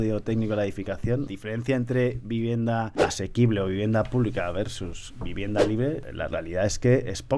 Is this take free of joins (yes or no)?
no